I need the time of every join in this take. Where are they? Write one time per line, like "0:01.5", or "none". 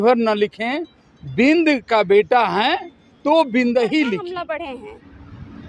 0:04.4